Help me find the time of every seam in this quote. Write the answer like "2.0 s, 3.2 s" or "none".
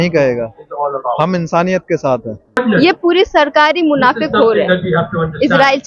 2.6 s